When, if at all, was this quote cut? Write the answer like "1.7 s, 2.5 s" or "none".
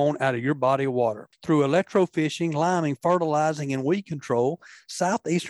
none